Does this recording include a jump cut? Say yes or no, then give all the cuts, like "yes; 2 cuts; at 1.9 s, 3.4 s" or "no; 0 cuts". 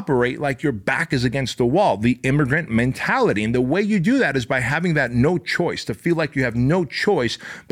no; 0 cuts